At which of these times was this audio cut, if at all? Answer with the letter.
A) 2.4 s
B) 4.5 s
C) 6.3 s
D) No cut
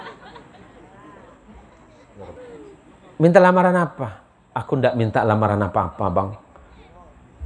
A